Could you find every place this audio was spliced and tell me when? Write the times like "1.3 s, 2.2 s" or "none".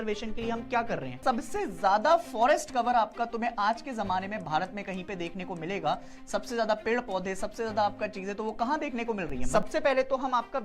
1.2 s, 9.4 s